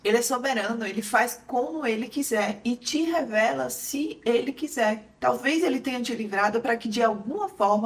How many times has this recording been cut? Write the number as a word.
one